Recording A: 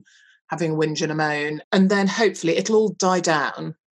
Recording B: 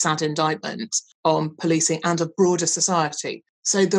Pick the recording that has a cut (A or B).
A